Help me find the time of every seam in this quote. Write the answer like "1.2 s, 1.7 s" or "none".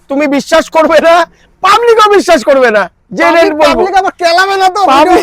none